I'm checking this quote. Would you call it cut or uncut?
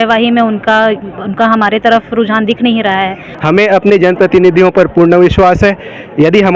cut